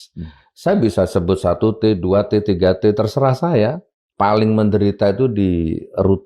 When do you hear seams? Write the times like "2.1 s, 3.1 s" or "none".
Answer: 4.0 s